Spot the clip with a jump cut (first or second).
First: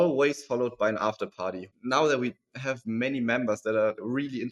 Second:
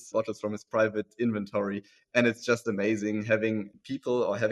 first